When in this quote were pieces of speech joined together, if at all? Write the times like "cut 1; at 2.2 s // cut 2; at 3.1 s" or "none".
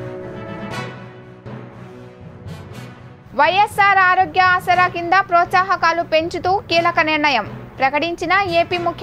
cut 1; at 3.1 s